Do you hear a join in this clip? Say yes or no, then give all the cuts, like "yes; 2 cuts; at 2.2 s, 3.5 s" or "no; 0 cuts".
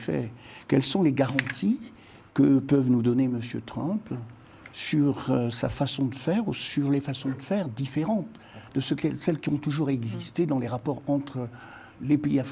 no; 0 cuts